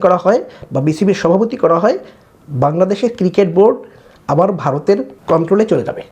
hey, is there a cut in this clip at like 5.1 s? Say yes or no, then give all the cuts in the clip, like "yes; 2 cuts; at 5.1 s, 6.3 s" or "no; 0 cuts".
yes; 1 cut; at 5.1 s